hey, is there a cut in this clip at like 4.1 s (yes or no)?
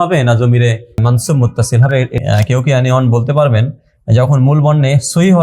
no